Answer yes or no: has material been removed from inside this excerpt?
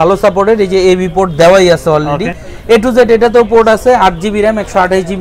no